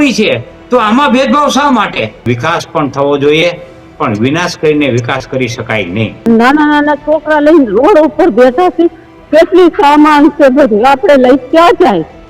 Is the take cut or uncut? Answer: cut